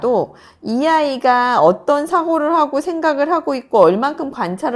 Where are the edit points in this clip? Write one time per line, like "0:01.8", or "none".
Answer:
none

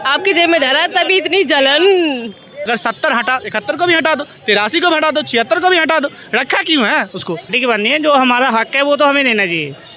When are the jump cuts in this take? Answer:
0:02.7
0:07.5

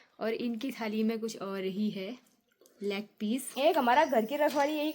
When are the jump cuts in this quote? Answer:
0:03.5

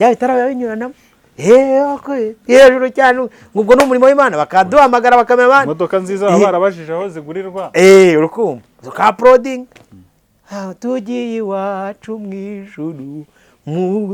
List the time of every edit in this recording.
none

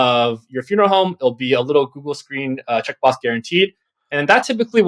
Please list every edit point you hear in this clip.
none

